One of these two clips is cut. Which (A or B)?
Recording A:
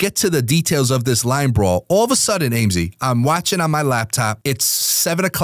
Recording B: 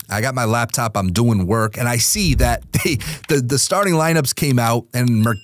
A